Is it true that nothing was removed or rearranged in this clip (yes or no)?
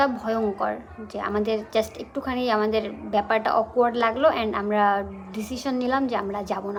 yes